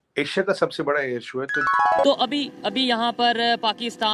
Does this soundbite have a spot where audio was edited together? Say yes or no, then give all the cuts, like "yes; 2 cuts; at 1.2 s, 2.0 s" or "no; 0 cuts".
yes; 1 cut; at 1.6 s